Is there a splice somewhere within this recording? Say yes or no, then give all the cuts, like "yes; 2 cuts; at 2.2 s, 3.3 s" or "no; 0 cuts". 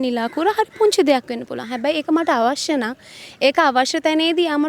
no; 0 cuts